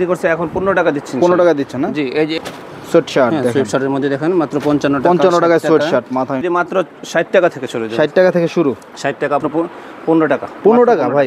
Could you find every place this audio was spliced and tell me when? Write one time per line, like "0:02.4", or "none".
0:02.4
0:06.4
0:09.4